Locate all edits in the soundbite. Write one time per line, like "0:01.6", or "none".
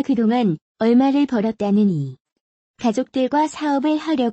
0:02.8